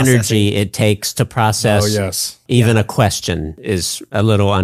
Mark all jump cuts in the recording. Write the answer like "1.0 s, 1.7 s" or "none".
2.4 s, 3.7 s